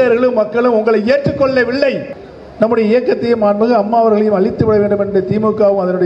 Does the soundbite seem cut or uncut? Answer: cut